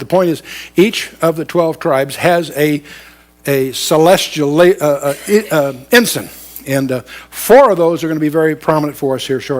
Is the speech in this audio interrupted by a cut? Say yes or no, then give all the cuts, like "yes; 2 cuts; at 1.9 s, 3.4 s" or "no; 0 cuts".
no; 0 cuts